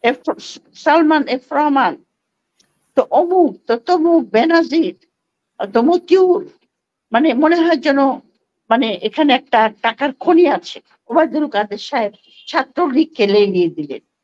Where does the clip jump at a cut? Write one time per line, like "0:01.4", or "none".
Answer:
0:11.1